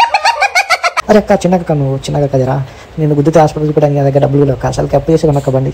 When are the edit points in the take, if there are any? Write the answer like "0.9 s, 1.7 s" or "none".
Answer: 1.0 s